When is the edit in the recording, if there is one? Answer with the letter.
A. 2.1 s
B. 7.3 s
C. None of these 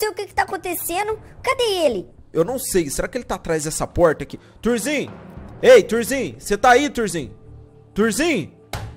C